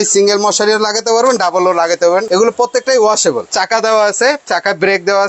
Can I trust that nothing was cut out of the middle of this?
no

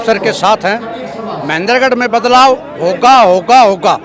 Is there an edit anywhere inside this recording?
no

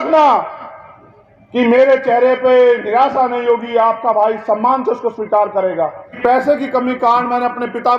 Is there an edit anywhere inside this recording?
yes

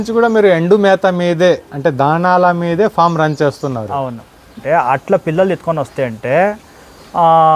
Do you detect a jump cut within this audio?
yes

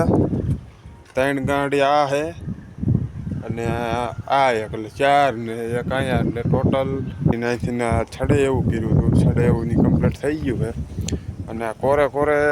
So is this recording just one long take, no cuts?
no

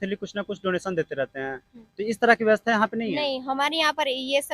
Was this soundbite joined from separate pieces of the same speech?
no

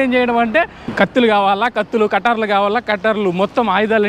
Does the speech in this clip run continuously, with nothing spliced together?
no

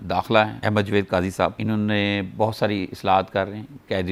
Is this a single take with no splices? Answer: yes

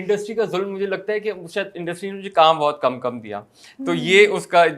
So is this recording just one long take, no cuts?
yes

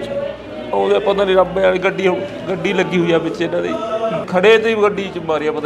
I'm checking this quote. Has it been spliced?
yes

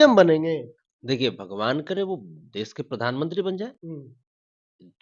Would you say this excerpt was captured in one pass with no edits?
yes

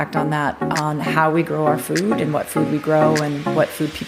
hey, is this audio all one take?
yes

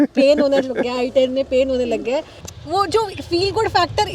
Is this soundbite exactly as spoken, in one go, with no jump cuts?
no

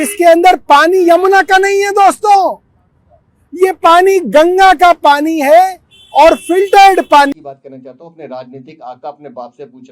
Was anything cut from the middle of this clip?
yes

